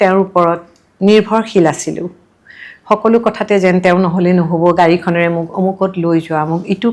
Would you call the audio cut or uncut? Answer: uncut